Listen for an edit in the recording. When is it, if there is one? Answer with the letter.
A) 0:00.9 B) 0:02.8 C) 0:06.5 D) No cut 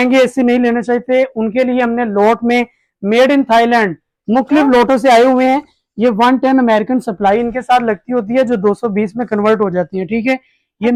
D